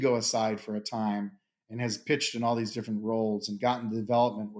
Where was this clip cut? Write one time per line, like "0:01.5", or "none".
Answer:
none